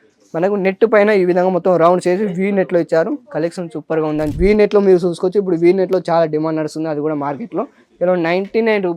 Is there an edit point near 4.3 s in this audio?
yes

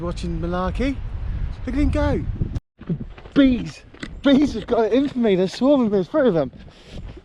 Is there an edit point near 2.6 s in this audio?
yes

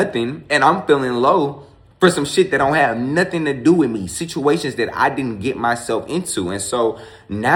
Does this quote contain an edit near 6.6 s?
no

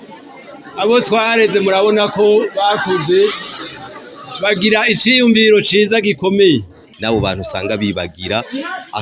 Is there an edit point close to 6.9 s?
yes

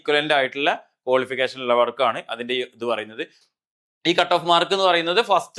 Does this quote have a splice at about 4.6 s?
no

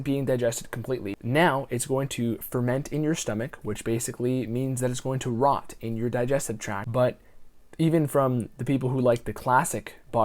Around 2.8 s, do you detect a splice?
no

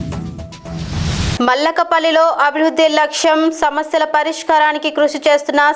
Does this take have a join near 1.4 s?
yes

